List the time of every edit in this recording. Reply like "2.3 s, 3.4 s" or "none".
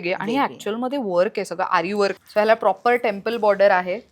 2.2 s